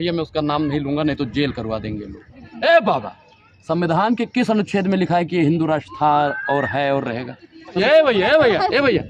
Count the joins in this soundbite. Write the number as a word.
two